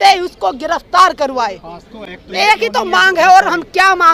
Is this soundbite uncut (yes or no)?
yes